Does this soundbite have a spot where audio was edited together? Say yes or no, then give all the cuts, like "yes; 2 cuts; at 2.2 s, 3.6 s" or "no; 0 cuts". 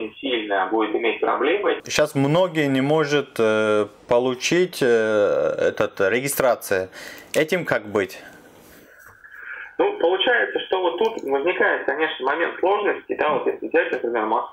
yes; 1 cut; at 1.8 s